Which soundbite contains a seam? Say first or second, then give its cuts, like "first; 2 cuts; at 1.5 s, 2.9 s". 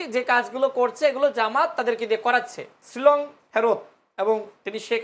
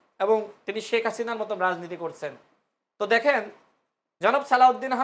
first; 1 cut; at 2.8 s